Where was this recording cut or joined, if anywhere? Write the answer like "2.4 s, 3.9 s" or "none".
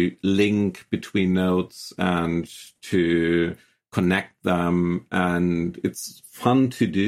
none